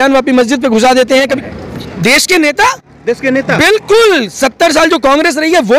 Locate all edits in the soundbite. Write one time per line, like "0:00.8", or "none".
0:01.4